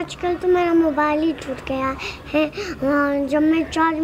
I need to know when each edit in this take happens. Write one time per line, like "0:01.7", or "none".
none